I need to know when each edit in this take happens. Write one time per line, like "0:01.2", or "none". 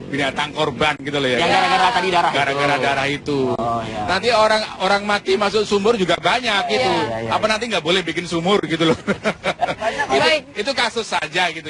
none